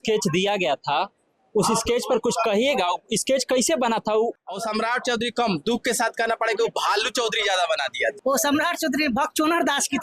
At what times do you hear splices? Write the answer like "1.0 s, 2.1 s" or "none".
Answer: 4.4 s, 8.2 s